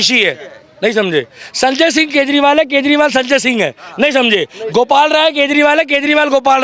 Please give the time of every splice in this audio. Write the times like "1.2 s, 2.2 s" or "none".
none

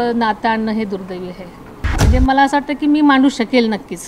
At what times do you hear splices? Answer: 2.0 s

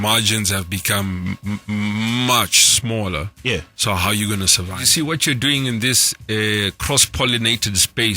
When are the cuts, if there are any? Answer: 4.8 s

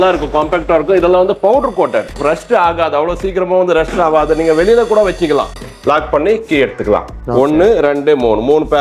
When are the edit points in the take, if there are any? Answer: 5.5 s, 7.2 s

